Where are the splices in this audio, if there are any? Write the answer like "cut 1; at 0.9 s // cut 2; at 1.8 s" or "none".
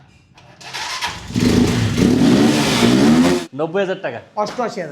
cut 1; at 3.4 s